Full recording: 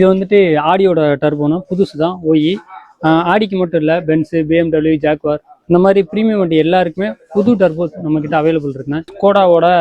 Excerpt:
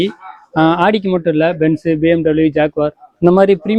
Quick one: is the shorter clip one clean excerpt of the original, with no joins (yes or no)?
yes